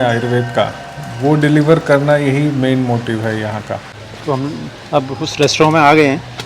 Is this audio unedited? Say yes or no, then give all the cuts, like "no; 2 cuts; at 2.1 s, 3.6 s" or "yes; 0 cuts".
no; 1 cut; at 3.9 s